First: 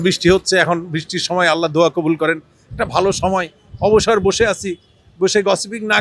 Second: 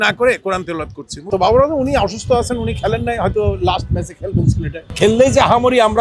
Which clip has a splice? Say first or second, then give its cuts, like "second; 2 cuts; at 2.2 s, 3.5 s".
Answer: second; 2 cuts; at 1.3 s, 4.8 s